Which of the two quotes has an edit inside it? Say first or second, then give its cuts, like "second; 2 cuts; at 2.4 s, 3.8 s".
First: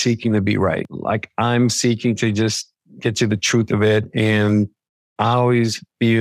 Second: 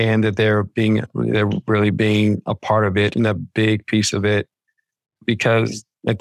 first; 1 cut; at 0.9 s